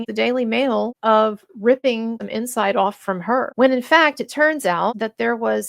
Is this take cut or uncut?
cut